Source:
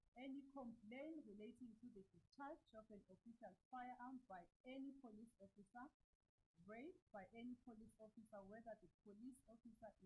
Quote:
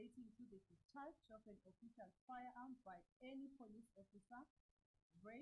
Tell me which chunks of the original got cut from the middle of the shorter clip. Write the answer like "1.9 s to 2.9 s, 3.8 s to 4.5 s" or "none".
none